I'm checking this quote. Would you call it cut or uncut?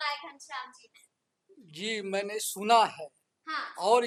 uncut